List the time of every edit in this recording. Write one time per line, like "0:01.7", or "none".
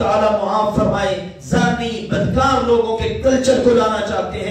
none